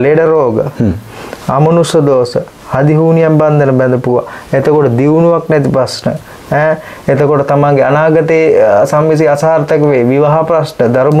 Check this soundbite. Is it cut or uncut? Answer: uncut